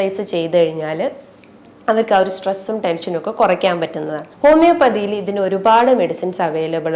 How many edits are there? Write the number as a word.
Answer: one